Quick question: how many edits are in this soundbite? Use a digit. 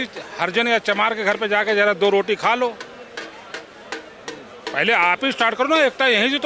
0